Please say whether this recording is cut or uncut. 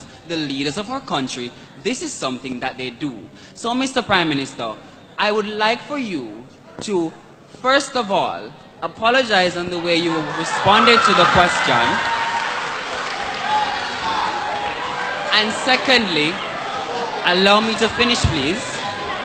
uncut